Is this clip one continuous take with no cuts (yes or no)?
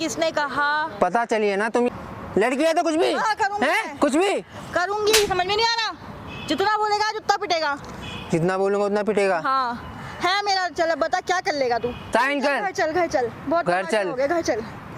no